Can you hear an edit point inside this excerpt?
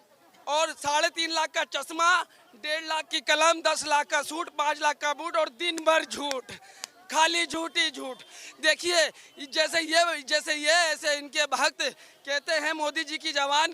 yes; 1 cut; at 8.4 s

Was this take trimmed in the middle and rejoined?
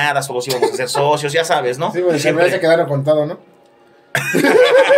no; 0 cuts

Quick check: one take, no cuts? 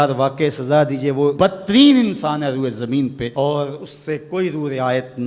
no; 2 cuts; at 1.3 s, 3.3 s

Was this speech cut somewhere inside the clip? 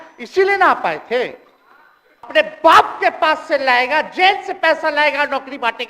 yes; 1 cut; at 2.3 s

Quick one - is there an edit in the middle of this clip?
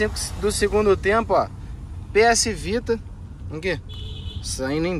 no; 0 cuts

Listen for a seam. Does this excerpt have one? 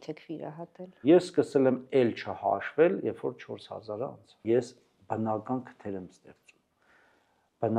yes; 2 cuts; at 1.0 s, 4.4 s

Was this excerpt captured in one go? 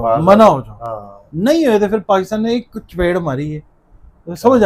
yes; 0 cuts

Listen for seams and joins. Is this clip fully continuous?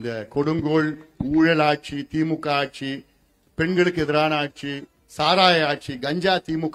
yes; 0 cuts

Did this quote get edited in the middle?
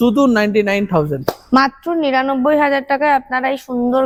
no; 0 cuts

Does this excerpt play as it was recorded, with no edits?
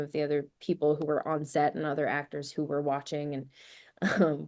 yes; 0 cuts

